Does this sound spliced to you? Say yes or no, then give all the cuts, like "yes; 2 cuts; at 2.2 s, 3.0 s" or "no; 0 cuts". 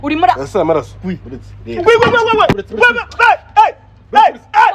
yes; 1 cut; at 2.5 s